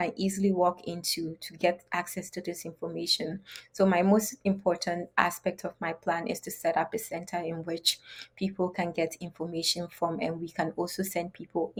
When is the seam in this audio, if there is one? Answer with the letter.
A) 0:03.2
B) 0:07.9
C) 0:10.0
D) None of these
D